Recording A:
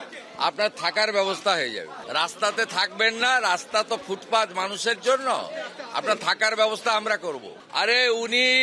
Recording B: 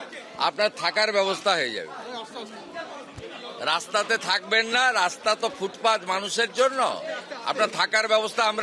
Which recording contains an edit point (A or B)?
A